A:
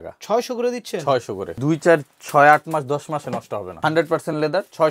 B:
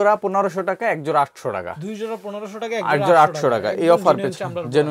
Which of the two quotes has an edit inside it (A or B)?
A